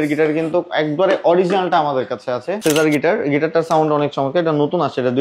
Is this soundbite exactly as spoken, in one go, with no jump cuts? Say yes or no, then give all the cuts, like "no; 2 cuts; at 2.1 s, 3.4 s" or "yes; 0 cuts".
no; 1 cut; at 2.5 s